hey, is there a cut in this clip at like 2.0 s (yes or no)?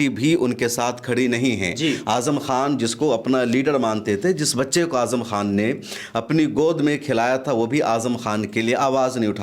no